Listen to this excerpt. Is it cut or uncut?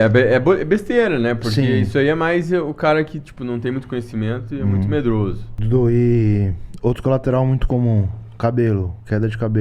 cut